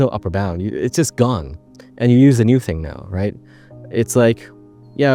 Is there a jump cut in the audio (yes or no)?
no